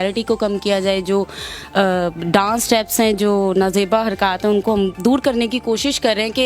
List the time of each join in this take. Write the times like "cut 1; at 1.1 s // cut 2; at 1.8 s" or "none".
none

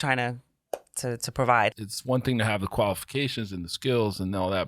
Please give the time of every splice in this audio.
cut 1; at 1.9 s

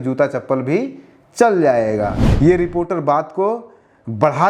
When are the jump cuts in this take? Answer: cut 1; at 2.2 s

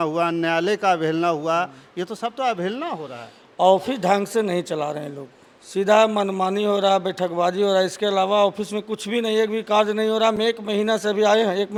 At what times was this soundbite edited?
none

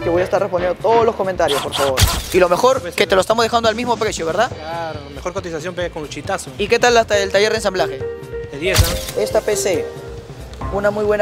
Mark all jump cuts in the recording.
cut 1; at 2.1 s // cut 2; at 9.0 s

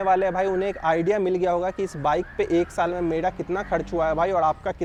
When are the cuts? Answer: none

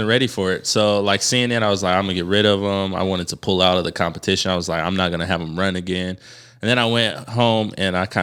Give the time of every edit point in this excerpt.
none

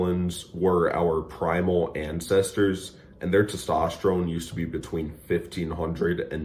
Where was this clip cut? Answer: none

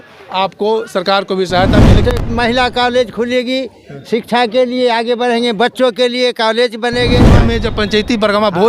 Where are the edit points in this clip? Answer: cut 1; at 2.0 s // cut 2; at 7.3 s

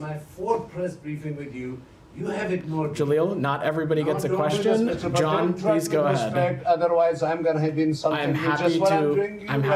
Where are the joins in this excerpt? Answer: none

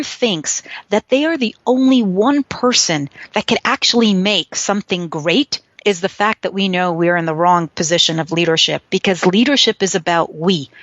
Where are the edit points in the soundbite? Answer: cut 1; at 5.6 s

